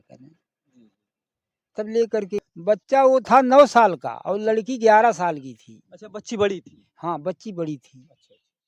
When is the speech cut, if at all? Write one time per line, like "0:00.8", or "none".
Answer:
0:02.5